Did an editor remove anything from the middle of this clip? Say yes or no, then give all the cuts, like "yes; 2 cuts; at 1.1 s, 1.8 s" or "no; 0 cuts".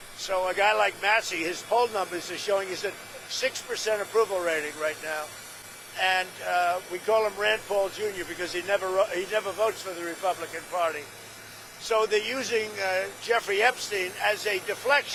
no; 0 cuts